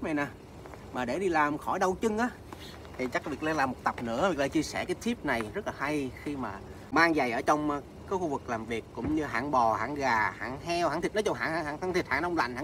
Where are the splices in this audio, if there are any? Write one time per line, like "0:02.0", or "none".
0:06.8